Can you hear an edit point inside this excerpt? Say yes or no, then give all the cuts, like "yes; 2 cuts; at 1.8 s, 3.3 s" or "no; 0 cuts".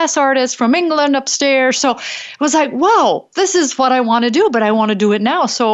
no; 0 cuts